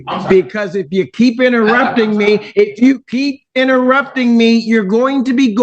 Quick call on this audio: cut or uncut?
uncut